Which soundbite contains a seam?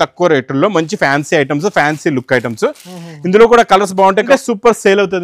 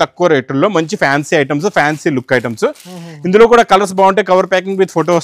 first; 1 cut; at 4.3 s

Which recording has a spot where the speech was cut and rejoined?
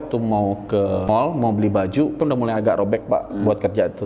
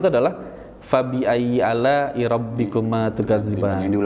first; 2 cuts; at 1.1 s, 2.2 s

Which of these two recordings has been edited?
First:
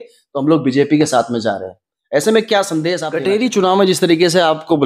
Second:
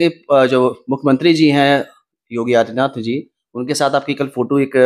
first; 1 cut; at 3.1 s

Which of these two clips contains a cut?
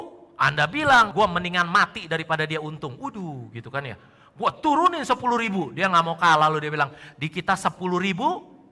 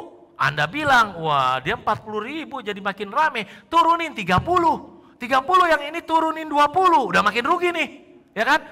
first; 1 cut; at 1.1 s

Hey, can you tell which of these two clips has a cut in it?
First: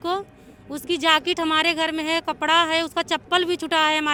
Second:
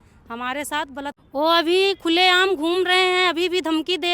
second; 1 cut; at 1.1 s

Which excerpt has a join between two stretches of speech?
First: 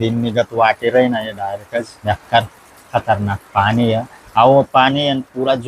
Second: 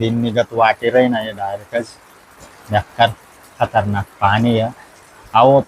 first; 2 cuts; at 1.9 s, 4.2 s

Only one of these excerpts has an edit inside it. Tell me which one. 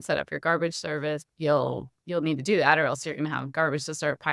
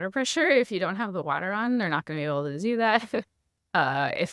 first; 1 cut; at 1.3 s

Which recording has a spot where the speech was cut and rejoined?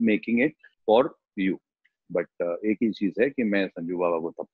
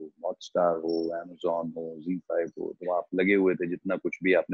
first; 1 cut; at 2.0 s

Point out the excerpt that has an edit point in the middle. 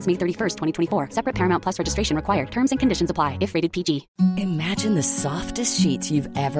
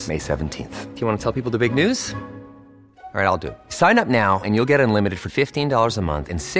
first; 1 cut; at 4.1 s

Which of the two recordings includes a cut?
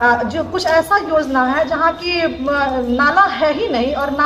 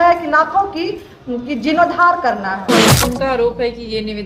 second; 1 cut; at 2.8 s

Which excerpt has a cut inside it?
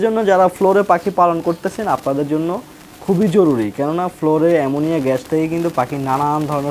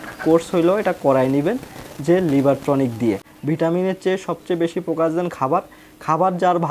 second; 1 cut; at 3.3 s

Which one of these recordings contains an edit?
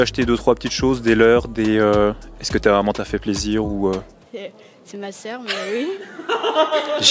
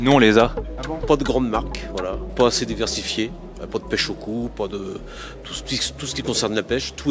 second; 2 cuts; at 1.0 s, 2.2 s

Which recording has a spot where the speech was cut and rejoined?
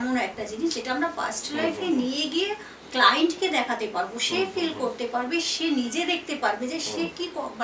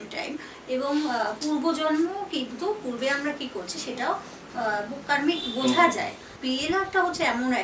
second; 1 cut; at 6.4 s

